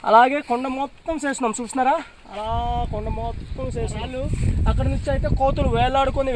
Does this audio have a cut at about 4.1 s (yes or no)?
yes